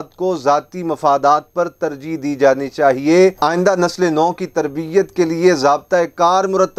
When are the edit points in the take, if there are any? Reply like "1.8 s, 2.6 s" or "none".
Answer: 3.4 s